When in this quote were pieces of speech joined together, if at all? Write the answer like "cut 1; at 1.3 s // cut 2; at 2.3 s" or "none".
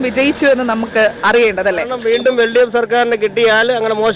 cut 1; at 2.0 s